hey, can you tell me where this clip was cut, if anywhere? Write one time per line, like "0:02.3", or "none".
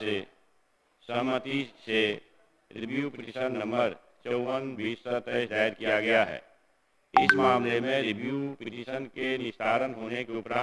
none